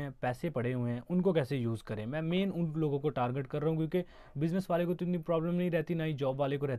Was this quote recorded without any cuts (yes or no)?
yes